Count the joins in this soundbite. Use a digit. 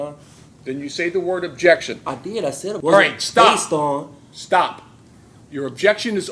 1